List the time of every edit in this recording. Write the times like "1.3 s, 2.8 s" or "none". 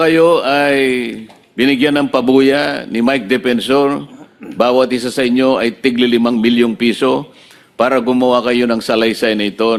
none

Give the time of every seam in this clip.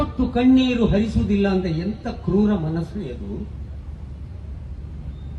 none

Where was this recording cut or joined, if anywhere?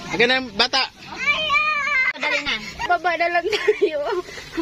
none

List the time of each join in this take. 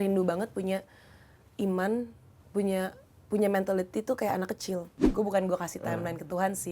5.0 s

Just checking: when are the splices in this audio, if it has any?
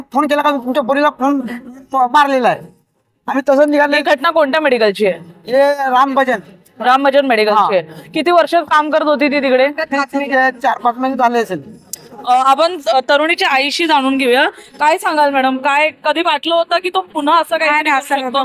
none

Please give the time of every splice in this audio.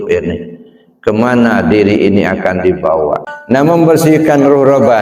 3.3 s

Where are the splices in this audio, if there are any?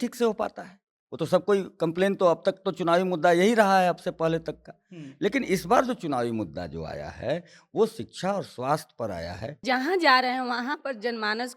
9.6 s

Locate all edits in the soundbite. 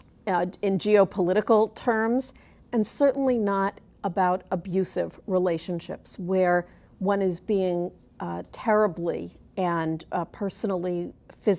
8.4 s

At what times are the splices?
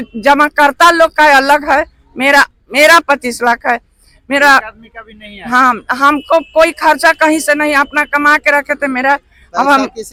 none

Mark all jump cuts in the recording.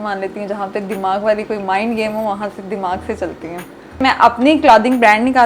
4.0 s

